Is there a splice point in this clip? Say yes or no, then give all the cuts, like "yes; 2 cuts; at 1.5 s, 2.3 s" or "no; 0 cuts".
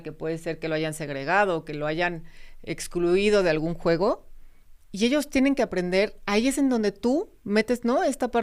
no; 0 cuts